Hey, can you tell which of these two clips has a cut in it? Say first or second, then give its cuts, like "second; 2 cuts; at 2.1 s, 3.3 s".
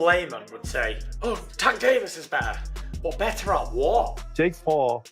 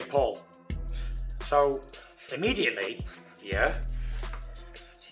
first; 1 cut; at 4.2 s